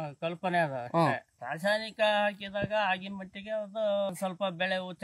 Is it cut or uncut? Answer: cut